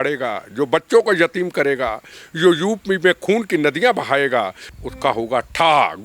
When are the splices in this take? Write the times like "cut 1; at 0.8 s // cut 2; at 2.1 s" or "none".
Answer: cut 1; at 4.7 s